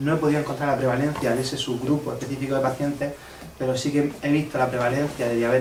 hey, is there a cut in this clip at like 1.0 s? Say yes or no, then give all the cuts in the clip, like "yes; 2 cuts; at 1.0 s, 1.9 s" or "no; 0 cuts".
no; 0 cuts